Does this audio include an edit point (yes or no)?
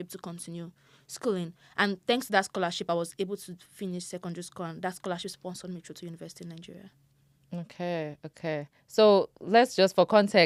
no